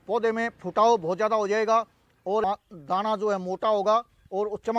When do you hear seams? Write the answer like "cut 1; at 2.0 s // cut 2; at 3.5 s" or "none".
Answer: cut 1; at 2.4 s